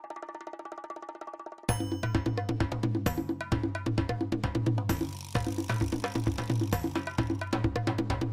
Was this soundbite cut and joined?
no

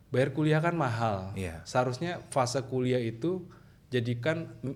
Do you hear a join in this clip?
no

